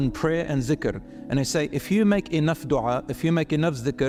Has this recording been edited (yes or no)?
no